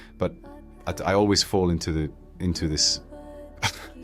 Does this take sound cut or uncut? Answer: uncut